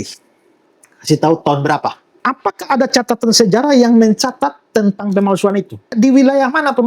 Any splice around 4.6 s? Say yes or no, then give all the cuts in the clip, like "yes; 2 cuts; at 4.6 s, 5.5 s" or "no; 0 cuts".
no; 2 cuts; at 2.1 s, 5.9 s